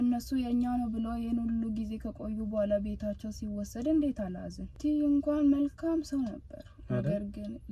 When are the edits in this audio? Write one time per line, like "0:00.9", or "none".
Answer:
0:04.7

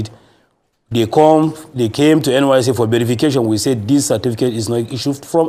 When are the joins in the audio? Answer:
none

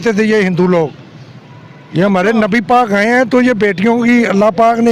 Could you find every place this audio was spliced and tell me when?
none

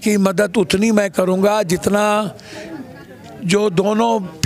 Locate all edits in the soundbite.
none

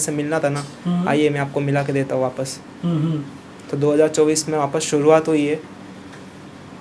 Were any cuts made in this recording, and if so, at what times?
none

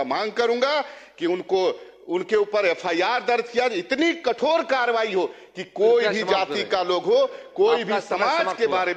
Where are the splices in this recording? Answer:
none

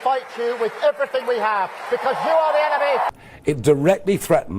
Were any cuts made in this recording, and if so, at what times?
0:03.1

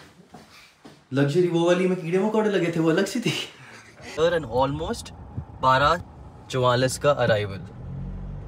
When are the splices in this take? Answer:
0:04.1

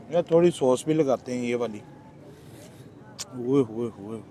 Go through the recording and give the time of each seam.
0:02.1

